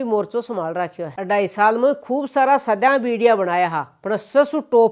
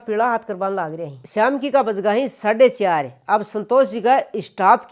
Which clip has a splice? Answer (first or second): first